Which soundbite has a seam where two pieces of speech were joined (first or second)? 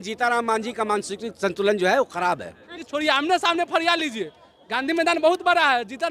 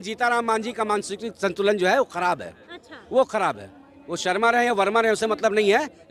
first